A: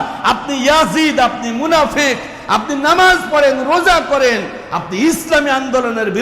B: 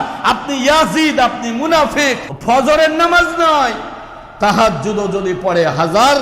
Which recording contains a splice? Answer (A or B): B